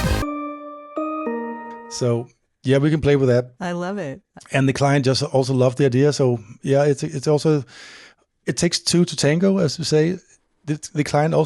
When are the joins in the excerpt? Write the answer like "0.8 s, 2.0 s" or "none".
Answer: 1.8 s